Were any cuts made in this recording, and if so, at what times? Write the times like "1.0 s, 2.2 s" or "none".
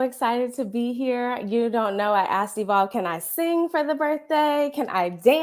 none